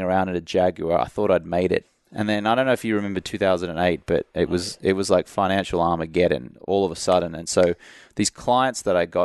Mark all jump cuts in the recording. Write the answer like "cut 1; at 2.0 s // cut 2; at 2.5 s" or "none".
cut 1; at 1.8 s